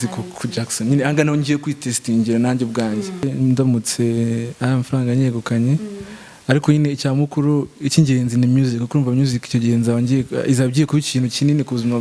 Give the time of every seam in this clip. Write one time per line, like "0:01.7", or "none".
0:03.3